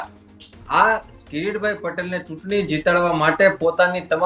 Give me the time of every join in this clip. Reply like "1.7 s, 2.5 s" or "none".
none